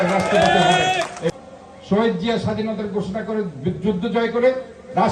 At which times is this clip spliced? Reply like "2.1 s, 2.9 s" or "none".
1.4 s